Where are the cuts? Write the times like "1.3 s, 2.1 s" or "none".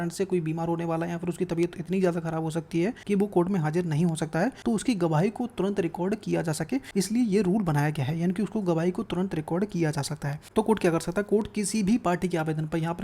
3.0 s, 4.6 s, 6.9 s, 10.4 s